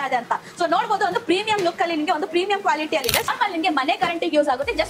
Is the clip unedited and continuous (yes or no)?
no